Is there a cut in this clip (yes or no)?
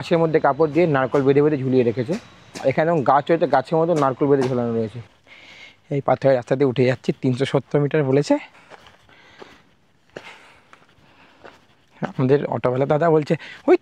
yes